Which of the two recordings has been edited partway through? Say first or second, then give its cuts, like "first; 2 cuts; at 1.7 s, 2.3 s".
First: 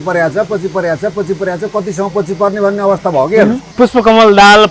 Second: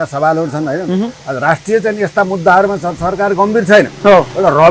first; 1 cut; at 3.7 s